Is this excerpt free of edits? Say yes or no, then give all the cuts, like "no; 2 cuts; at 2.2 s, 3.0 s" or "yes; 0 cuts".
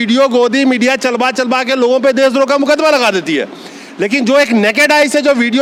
yes; 0 cuts